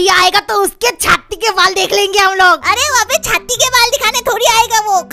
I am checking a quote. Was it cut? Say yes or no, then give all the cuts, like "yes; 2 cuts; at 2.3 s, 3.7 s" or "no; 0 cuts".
no; 0 cuts